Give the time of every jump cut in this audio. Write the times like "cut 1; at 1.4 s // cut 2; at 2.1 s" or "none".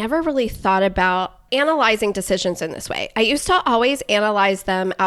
cut 1; at 1.4 s